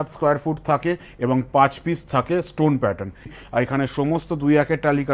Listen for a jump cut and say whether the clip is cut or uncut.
cut